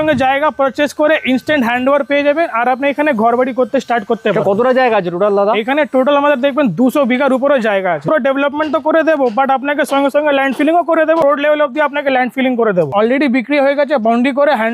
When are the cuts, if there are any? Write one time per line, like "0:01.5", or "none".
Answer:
0:08.0
0:11.2
0:12.9